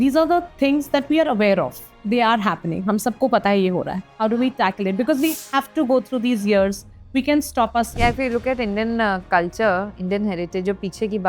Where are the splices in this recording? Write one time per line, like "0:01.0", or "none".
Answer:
0:04.0
0:07.9